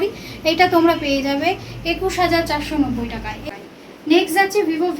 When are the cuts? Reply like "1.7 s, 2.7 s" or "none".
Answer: 3.4 s